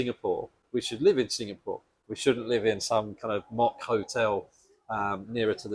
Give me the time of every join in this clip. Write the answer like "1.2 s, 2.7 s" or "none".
none